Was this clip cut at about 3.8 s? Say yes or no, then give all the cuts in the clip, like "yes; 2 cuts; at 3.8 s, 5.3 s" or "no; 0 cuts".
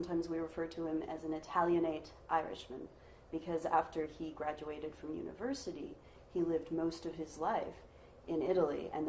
no; 1 cut; at 1.1 s